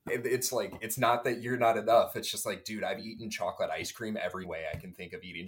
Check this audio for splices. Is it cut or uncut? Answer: cut